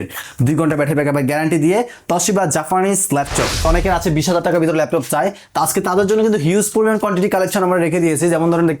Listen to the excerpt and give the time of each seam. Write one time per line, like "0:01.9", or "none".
0:03.6